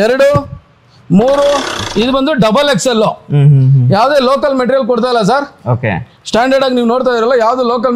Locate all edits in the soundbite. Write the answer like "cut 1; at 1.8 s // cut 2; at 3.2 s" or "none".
cut 1; at 1.8 s